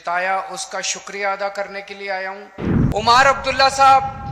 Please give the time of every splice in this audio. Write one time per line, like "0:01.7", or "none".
0:02.7

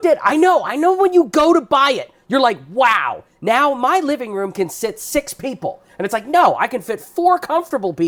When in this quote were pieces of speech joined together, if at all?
none

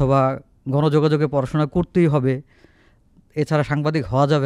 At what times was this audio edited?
none

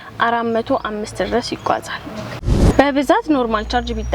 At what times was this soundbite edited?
0:02.6

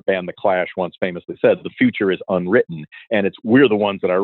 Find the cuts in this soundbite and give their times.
none

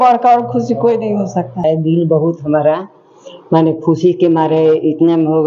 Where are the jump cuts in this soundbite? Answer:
0:01.6

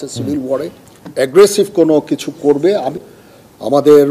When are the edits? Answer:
0:02.9

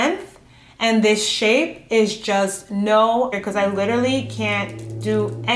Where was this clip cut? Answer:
0:03.4

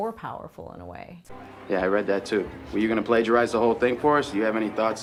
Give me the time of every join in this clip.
none

